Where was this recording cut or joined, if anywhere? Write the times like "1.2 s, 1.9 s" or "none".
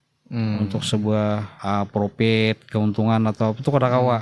1.5 s